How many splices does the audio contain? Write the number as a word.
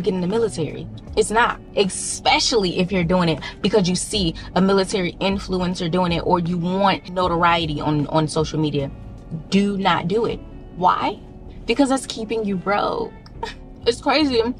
zero